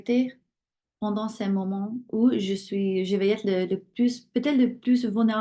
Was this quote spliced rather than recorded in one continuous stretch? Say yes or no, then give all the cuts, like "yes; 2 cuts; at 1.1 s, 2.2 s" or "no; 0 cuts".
no; 0 cuts